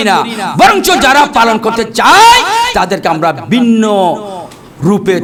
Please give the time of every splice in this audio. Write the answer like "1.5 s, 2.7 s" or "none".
none